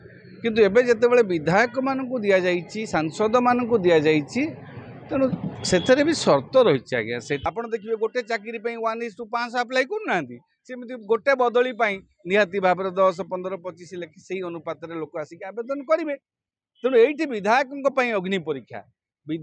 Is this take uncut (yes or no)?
no